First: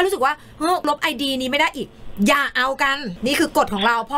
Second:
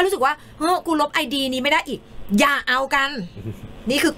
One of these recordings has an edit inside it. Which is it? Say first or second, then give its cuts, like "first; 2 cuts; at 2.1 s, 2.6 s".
first; 2 cuts; at 0.8 s, 3.1 s